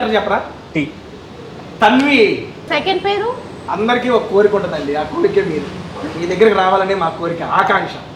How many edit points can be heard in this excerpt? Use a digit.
2